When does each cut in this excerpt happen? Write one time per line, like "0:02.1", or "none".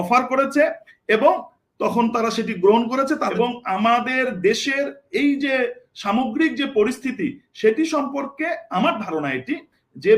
0:03.3